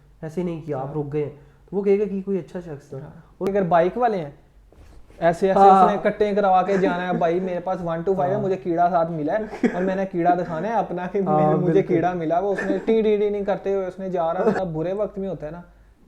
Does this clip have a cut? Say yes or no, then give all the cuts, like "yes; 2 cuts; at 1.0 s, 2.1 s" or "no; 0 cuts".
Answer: yes; 2 cuts; at 3.4 s, 14.6 s